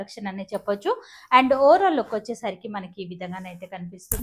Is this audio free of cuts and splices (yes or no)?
yes